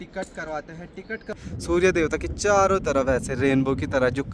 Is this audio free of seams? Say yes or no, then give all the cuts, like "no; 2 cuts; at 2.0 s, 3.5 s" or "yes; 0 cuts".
no; 1 cut; at 1.4 s